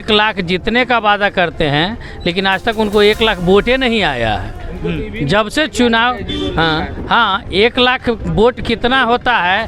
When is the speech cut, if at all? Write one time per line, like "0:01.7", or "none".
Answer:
none